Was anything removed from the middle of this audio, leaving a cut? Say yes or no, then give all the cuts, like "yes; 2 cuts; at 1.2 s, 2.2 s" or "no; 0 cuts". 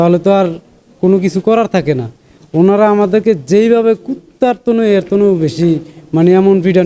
no; 0 cuts